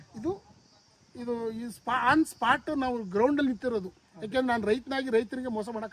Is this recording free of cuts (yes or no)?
yes